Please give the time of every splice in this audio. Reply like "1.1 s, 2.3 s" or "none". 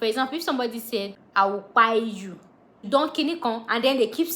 1.2 s, 2.8 s